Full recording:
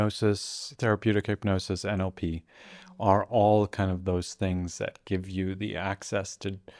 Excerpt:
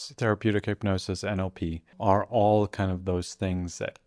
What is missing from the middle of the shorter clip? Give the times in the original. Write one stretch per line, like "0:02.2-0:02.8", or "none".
0:02.5-0:02.8